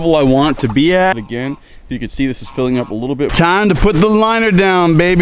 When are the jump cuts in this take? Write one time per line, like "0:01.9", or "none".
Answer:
0:01.2
0:03.3